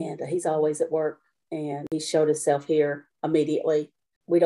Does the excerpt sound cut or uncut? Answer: uncut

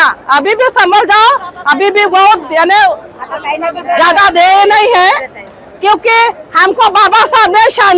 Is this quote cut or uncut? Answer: uncut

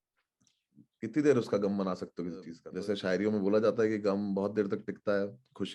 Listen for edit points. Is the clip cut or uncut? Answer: cut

